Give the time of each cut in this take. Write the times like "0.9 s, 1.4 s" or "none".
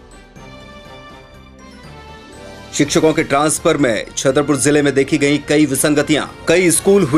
2.4 s